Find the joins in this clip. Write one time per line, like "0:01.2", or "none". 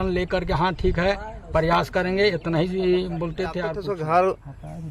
0:03.8